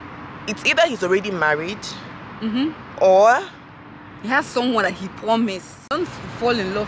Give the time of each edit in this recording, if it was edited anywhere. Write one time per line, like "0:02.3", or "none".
0:05.9